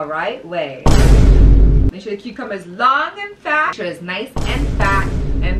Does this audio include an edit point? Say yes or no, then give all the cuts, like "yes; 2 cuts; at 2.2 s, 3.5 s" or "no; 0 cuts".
yes; 2 cuts; at 1.9 s, 3.8 s